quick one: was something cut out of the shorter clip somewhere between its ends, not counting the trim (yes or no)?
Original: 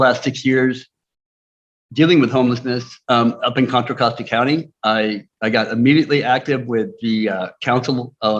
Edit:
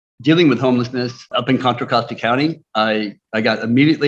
yes